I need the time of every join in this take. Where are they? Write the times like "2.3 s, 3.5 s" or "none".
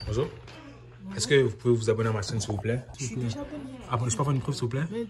2.9 s